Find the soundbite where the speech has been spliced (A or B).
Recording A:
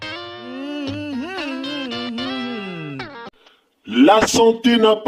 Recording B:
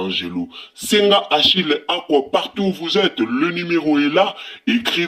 A